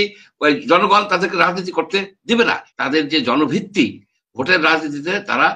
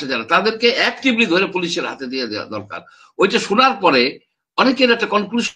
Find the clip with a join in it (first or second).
first